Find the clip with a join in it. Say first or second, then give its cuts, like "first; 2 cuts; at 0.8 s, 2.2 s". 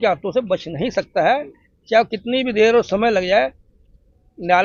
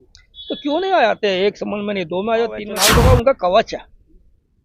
second; 1 cut; at 2.7 s